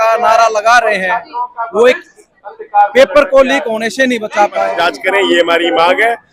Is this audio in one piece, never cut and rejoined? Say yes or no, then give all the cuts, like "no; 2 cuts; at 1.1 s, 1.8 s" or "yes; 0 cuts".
no; 1 cut; at 4.7 s